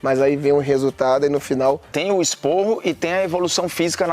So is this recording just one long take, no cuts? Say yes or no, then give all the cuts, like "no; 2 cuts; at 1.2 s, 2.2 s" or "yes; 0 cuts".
no; 1 cut; at 1.9 s